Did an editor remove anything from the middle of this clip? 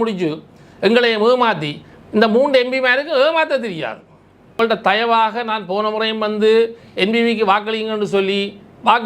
yes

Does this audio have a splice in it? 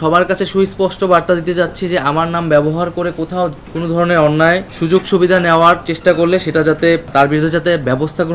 yes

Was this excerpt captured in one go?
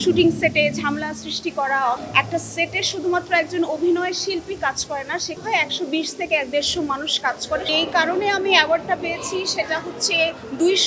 no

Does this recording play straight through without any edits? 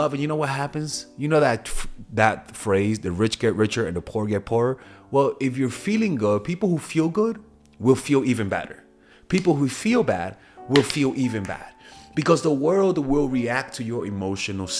yes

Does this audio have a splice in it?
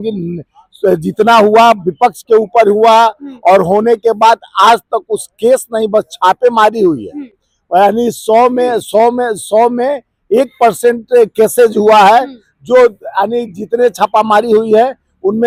no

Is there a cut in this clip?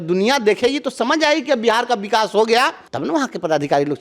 yes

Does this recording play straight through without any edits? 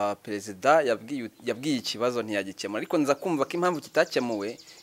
yes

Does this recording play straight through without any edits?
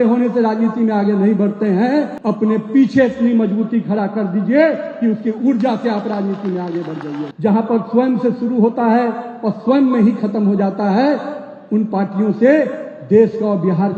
no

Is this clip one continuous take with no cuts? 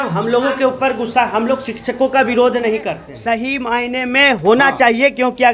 no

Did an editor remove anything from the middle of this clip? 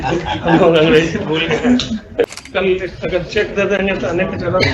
yes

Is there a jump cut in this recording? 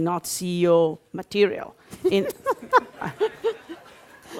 no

